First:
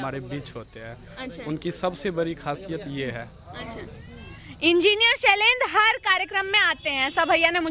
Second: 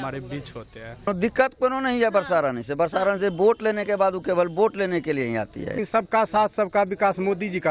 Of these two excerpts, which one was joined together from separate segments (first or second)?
second